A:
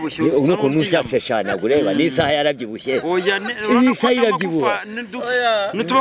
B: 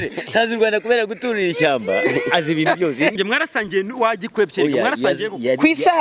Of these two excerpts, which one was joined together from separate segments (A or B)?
B